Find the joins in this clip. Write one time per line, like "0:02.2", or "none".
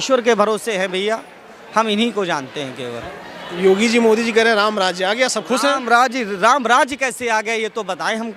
none